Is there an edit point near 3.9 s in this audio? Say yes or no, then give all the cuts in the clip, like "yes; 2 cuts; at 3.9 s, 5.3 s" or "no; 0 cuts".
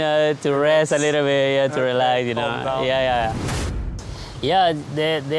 yes; 1 cut; at 3.9 s